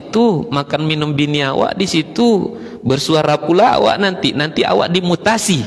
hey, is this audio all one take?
yes; 0 cuts

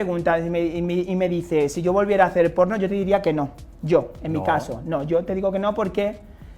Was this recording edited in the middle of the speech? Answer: no; 0 cuts

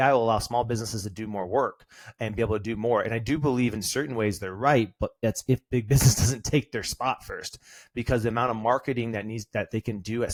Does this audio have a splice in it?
no; 0 cuts

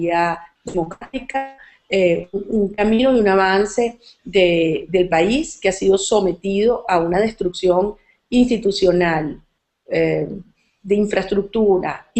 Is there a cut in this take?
yes; 1 cut; at 6.7 s

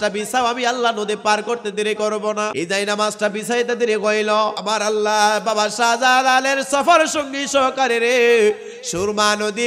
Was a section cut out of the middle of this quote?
yes; 2 cuts; at 2.5 s, 4.6 s

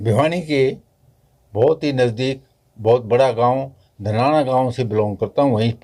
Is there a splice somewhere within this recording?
no; 0 cuts

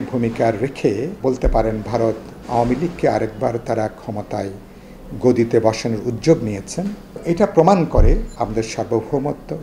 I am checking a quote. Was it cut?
yes; 3 cuts; at 1.1 s, 7.1 s, 8.3 s

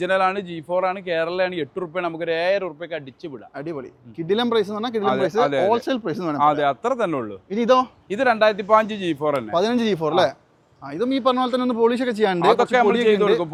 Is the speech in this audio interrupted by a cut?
no; 0 cuts

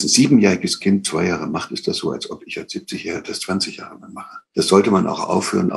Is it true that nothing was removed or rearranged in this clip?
no; 1 cut; at 4.4 s

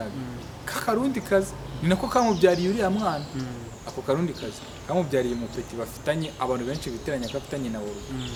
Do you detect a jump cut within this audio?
no; 0 cuts

